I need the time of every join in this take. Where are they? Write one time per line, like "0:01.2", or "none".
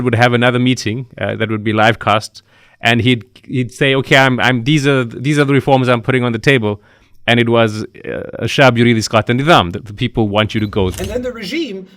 0:10.9